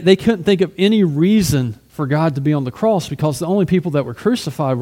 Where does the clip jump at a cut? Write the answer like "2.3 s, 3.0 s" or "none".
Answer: 1.8 s